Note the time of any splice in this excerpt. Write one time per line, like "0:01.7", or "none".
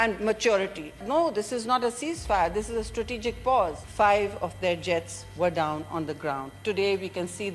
0:01.0
0:03.8